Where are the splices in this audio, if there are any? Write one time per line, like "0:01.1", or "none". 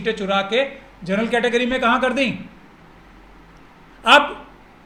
none